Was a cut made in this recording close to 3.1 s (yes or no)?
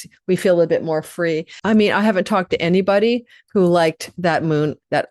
no